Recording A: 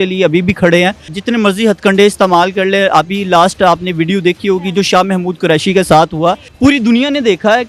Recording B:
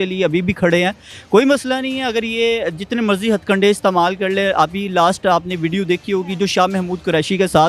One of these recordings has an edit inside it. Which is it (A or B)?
A